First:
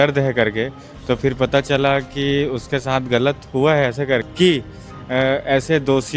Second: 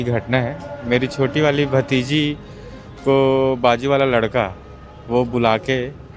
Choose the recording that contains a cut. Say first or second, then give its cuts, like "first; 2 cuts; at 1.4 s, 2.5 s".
first; 1 cut; at 4.2 s